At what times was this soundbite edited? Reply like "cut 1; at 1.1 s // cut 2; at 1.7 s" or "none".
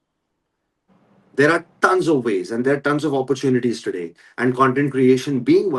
none